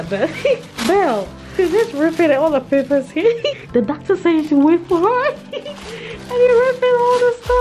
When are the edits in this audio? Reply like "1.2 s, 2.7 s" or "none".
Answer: 1.4 s, 3.6 s